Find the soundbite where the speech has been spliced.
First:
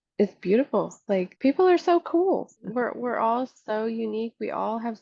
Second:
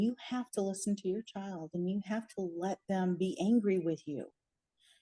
first; 2 cuts; at 1.3 s, 2.6 s

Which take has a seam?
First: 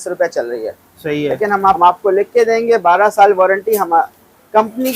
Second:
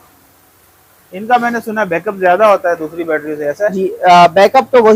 first; 1 cut; at 1.8 s

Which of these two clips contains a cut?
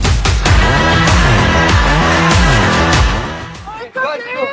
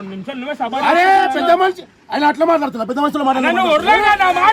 first; 1 cut; at 3.4 s

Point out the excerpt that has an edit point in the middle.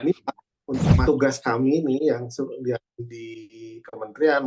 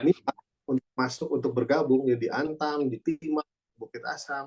first; 1 cut; at 1.0 s

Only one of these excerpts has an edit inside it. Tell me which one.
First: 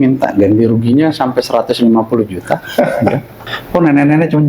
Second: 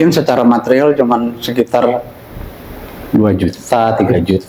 first; 1 cut; at 3.5 s

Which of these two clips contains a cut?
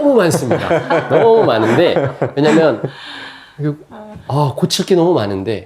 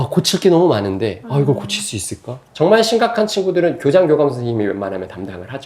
second; 1 cut; at 2.4 s

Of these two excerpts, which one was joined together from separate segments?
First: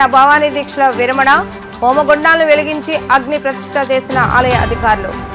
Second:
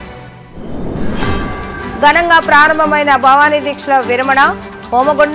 second; 1 cut; at 1.3 s

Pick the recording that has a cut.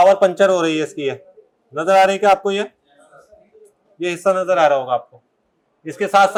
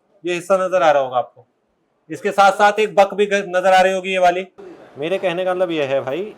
second; 1 cut; at 4.5 s

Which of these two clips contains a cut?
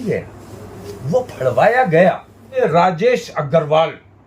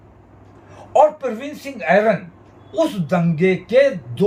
first; 1 cut; at 2.6 s

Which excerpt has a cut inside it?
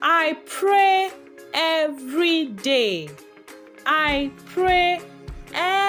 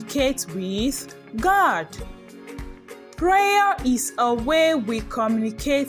second; 2 cuts; at 1.9 s, 3.2 s

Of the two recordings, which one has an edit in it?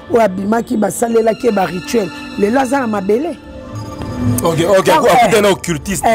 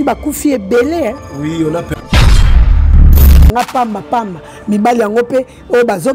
second; 1 cut; at 3.5 s

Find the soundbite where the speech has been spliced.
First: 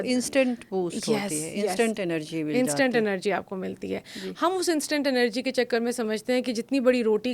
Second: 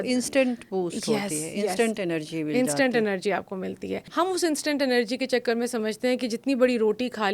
second; 1 cut; at 4.1 s

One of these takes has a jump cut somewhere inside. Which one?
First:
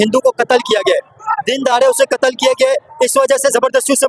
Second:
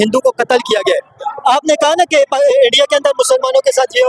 second; 1 cut; at 1.2 s

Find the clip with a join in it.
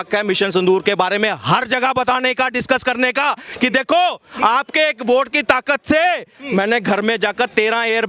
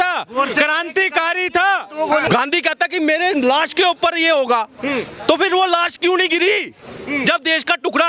second; 1 cut; at 2.2 s

